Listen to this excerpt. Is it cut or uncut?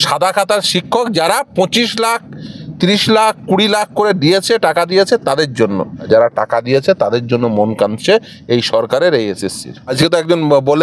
cut